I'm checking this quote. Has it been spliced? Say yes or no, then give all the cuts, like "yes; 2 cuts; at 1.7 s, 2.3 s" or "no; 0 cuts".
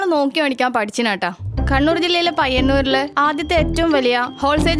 no; 0 cuts